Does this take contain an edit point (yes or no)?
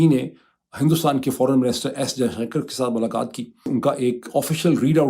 yes